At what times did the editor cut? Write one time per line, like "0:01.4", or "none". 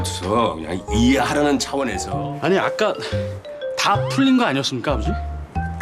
0:02.0